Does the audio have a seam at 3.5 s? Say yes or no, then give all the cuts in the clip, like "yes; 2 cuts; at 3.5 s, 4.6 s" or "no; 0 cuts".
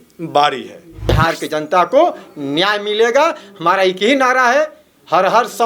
no; 1 cut; at 1.1 s